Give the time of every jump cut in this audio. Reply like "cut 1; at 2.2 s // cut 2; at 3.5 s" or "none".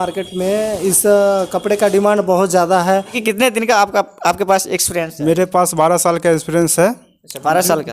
cut 1; at 3.2 s